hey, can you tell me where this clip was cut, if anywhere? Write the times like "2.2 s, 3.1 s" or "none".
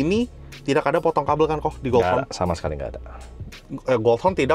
none